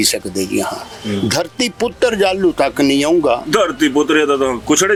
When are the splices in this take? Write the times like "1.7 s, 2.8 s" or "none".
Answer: none